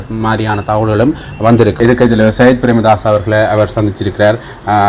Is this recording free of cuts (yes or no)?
no